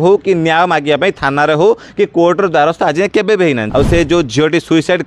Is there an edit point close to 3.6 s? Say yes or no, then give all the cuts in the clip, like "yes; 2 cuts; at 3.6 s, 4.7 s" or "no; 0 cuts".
yes; 1 cut; at 3.6 s